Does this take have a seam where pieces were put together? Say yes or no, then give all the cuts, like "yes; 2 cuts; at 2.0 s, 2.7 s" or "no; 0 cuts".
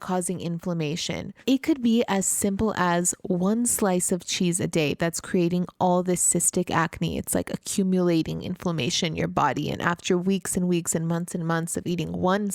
yes; 1 cut; at 1.4 s